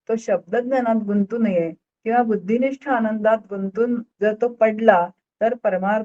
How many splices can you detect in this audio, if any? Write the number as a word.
one